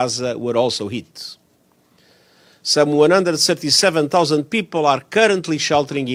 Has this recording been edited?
no; 0 cuts

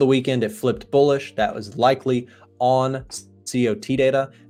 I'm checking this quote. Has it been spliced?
no; 0 cuts

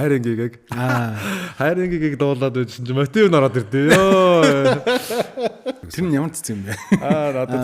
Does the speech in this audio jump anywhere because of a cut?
yes; 1 cut; at 5.8 s

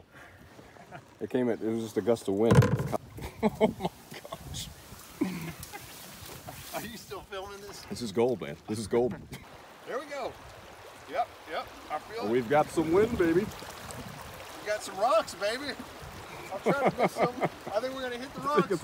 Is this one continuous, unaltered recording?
no; 2 cuts; at 3.0 s, 9.4 s

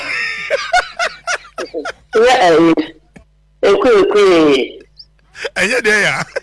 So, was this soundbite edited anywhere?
no; 0 cuts

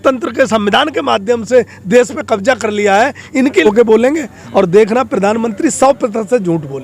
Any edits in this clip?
yes; 1 cut; at 3.7 s

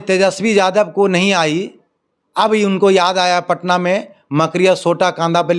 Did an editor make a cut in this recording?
no; 0 cuts

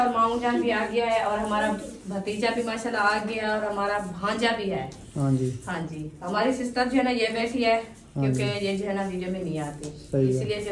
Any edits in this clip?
no; 0 cuts

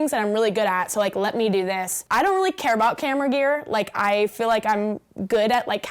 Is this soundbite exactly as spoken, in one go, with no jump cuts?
no; 1 cut; at 1.9 s

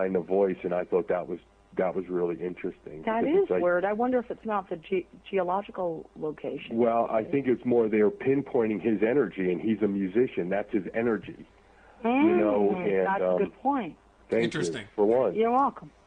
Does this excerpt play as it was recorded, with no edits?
yes; 0 cuts

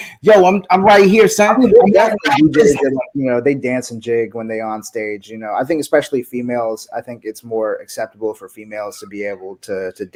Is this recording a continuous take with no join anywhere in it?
yes; 0 cuts

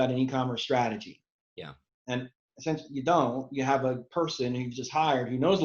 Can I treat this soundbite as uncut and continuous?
yes; 0 cuts

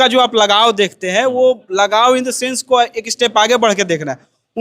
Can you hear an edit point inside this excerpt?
no; 0 cuts

